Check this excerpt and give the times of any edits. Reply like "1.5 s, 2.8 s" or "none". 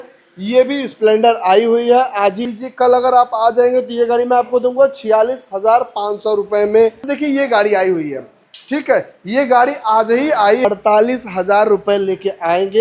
2.4 s, 7.1 s, 10.6 s